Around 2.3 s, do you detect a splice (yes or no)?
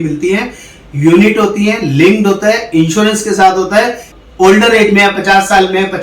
no